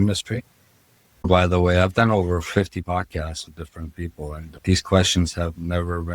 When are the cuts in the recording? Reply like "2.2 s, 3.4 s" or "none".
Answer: 1.3 s, 2.8 s